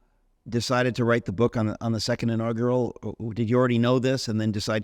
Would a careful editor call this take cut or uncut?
uncut